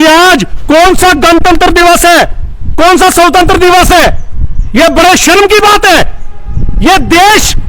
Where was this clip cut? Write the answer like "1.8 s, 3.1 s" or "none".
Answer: none